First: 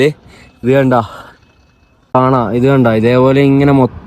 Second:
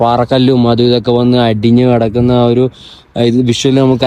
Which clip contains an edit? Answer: first; 1 cut; at 2.1 s

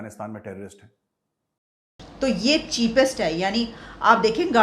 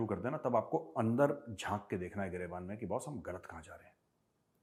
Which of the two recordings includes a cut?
first; 1 cut; at 2.0 s

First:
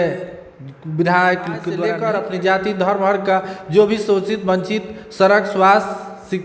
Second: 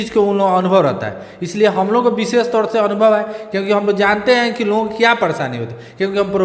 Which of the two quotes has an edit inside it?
first; 1 cut; at 1.8 s

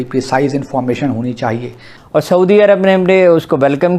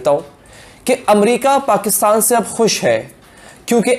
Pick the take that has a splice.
first; 1 cut; at 1.9 s

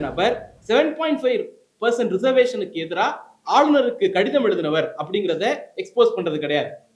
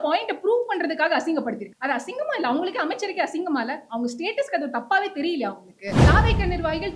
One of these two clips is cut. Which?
second; 2 cuts; at 1.7 s, 6.0 s

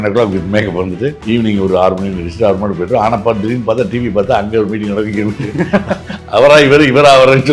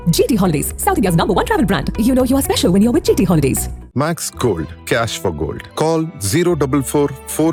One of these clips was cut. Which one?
first; 1 cut; at 1.2 s

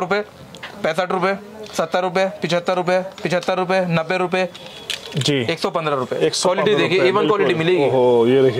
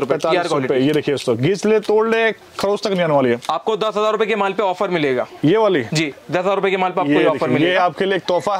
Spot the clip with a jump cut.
second; 1 cut; at 3.5 s

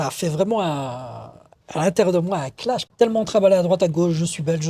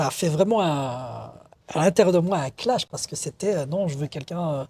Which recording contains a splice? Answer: first; 1 cut; at 2.9 s

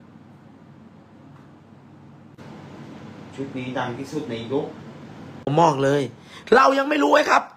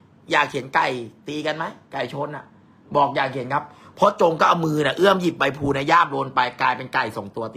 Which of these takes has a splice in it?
first; 2 cuts; at 2.4 s, 5.5 s

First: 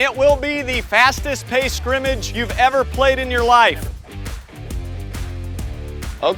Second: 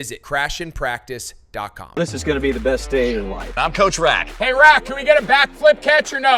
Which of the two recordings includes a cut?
second; 1 cut; at 1.9 s

